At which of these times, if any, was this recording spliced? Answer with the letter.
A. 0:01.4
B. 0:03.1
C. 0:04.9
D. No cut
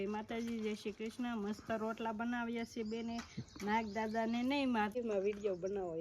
C